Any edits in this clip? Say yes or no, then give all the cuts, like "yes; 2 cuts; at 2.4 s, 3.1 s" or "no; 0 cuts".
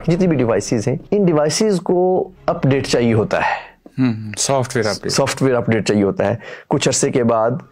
yes; 2 cuts; at 1.0 s, 2.3 s